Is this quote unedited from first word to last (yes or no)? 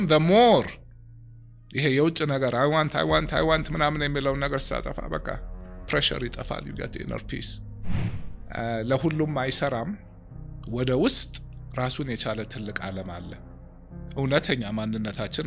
yes